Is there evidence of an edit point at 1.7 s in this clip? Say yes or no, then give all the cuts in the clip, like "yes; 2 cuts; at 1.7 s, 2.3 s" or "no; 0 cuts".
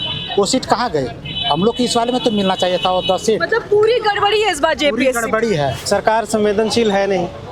no; 1 cut; at 5.8 s